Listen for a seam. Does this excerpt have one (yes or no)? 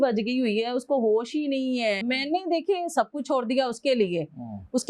yes